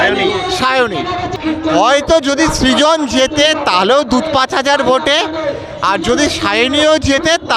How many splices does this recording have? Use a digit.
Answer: 1